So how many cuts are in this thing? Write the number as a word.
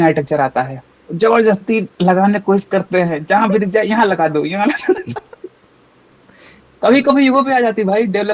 zero